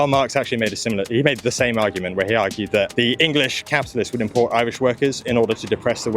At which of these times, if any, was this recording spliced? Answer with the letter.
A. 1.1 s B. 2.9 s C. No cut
B